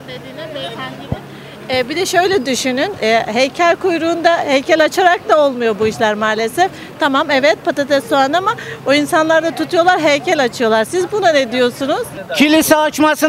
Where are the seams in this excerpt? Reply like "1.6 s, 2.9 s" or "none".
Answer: 12.2 s